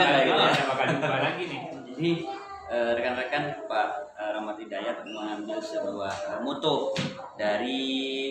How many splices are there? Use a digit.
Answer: 1